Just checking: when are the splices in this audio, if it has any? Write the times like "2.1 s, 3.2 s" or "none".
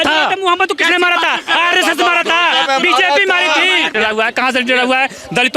3.9 s